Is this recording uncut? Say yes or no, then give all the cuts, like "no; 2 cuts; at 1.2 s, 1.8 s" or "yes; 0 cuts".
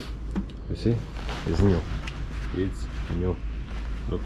yes; 0 cuts